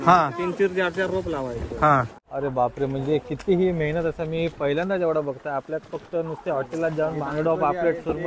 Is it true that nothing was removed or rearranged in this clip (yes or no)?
no